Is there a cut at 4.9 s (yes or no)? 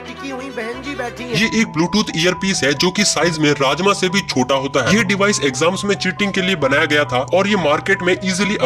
yes